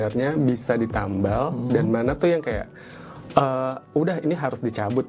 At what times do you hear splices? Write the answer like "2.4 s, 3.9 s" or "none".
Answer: none

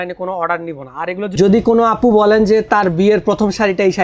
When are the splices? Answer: 1.3 s

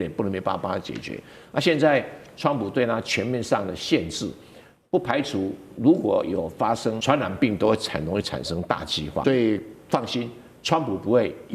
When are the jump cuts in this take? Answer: 7.0 s, 9.2 s

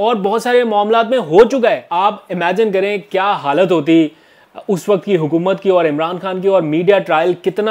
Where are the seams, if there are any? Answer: 1.9 s

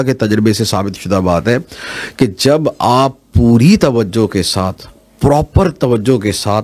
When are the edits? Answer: none

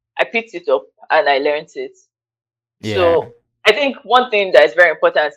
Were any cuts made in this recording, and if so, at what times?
none

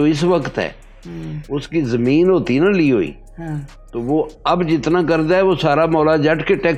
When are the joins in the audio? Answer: none

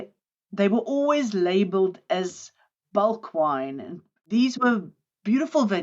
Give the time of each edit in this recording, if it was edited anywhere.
4.1 s

